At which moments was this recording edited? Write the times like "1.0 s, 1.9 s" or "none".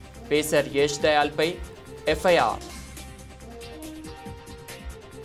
none